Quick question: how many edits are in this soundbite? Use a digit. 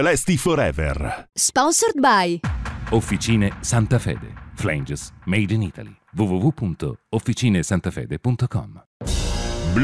1